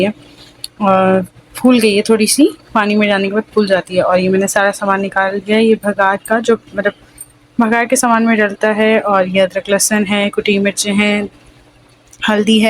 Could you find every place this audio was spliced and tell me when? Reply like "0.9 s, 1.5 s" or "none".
none